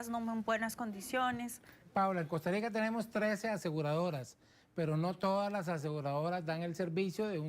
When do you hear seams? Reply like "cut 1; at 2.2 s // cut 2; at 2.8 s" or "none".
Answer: cut 1; at 1.8 s